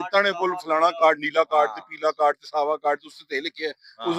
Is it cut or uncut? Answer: uncut